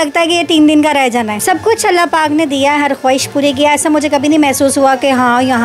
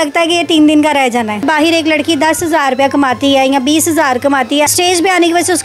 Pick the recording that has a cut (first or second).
second